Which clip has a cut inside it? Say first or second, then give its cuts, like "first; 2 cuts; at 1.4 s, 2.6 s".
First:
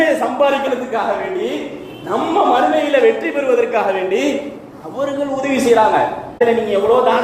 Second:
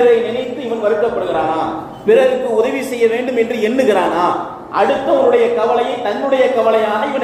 first; 1 cut; at 6.2 s